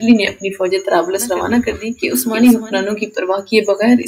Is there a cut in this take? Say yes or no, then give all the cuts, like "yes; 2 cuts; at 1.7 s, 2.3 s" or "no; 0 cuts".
yes; 1 cut; at 1.9 s